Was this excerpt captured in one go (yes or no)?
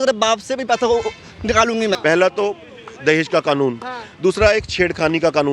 no